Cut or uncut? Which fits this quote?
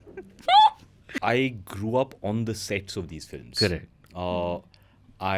cut